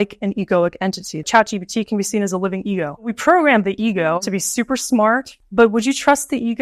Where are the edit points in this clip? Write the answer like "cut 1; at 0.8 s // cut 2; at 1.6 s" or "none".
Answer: cut 1; at 1.3 s // cut 2; at 3.1 s // cut 3; at 4.2 s // cut 4; at 5.3 s